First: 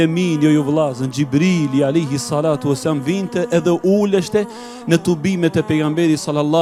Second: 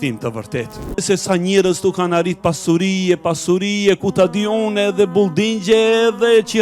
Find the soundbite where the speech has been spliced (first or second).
second